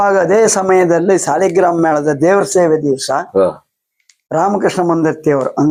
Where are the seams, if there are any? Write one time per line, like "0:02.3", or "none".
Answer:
none